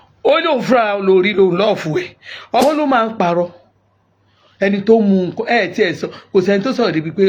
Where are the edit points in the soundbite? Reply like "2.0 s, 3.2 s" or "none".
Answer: 2.6 s